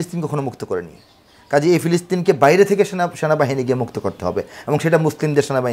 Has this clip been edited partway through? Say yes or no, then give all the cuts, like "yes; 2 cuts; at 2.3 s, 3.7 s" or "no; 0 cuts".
no; 0 cuts